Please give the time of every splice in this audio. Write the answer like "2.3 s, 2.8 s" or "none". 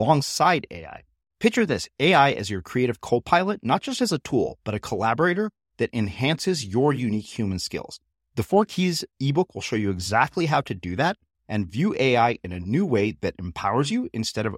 none